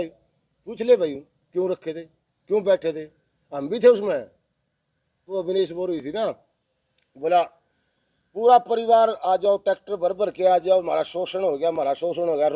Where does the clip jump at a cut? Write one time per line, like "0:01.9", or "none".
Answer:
0:05.3